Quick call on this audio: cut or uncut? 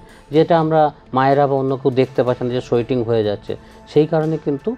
uncut